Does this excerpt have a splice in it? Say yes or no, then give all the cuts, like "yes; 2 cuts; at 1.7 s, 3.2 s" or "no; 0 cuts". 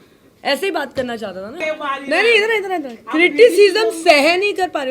yes; 1 cut; at 1.6 s